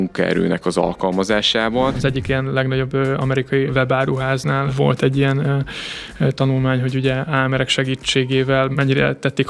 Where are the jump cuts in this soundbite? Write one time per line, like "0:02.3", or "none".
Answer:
0:02.0
0:03.7
0:04.7
0:07.3
0:08.7